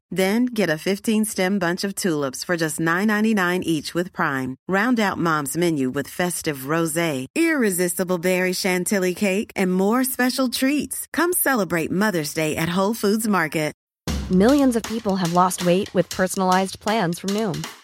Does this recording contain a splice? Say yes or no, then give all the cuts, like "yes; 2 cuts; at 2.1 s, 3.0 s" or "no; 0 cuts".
yes; 1 cut; at 13.8 s